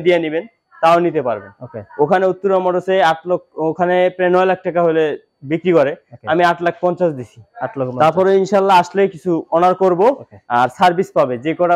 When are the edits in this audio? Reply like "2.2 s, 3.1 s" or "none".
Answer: none